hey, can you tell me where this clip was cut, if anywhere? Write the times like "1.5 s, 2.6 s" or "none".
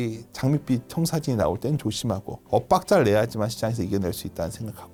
none